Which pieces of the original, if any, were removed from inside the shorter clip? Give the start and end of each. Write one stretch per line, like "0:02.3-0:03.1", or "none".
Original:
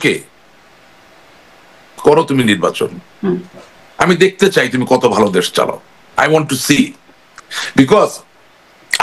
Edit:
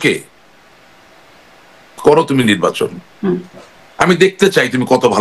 none